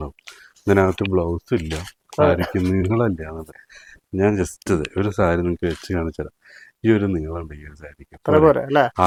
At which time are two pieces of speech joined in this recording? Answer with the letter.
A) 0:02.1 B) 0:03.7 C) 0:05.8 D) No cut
D